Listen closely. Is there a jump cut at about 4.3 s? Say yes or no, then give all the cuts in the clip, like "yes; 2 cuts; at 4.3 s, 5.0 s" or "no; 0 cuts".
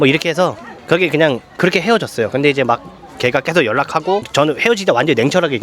yes; 1 cut; at 4.3 s